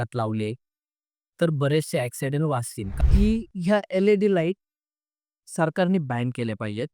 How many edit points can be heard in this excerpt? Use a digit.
1